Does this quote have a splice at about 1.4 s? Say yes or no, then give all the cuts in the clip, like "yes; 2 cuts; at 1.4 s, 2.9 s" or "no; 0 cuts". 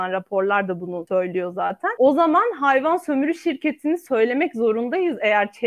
yes; 1 cut; at 1.4 s